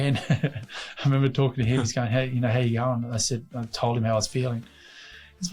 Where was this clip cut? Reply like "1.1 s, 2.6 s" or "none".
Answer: none

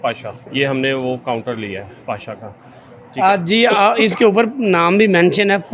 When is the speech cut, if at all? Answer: none

